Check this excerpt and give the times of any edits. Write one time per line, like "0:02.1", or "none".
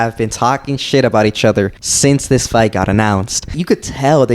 0:01.8
0:03.6